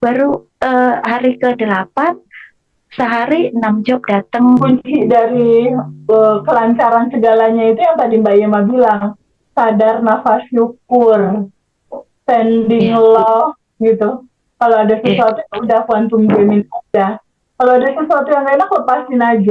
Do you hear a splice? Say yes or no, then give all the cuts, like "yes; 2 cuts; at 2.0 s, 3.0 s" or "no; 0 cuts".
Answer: yes; 1 cut; at 4.6 s